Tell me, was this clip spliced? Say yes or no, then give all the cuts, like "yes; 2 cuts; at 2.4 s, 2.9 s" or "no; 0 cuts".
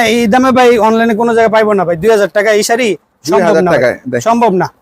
no; 0 cuts